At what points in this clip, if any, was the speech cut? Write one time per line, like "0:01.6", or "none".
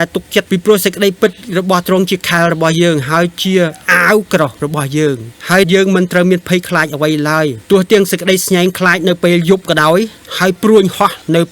none